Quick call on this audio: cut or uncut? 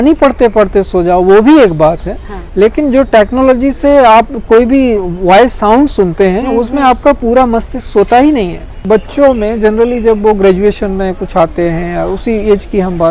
cut